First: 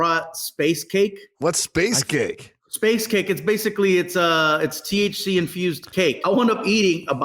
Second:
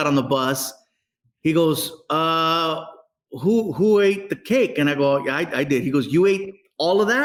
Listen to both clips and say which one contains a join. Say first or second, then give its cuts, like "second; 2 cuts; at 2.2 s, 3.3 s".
first; 2 cuts; at 1.2 s, 6.2 s